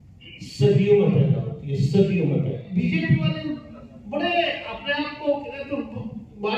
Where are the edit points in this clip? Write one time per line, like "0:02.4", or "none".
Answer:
0:02.6